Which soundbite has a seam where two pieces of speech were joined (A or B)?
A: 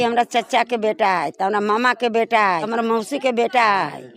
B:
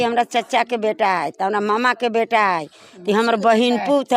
A